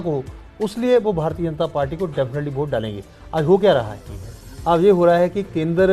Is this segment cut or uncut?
uncut